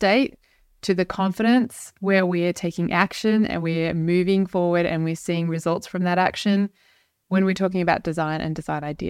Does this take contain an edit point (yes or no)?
no